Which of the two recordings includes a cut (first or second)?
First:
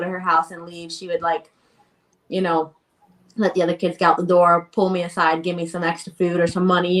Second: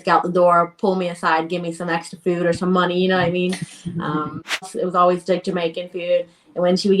second